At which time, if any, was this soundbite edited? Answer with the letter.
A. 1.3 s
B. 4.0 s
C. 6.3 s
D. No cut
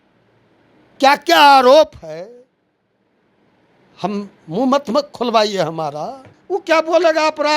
C